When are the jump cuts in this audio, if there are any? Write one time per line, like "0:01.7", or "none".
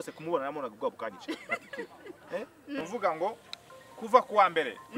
0:02.8